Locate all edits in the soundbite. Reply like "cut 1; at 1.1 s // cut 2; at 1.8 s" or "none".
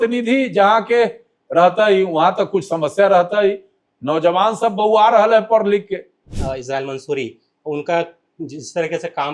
cut 1; at 6.3 s